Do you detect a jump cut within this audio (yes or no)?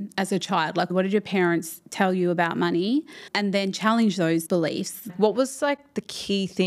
yes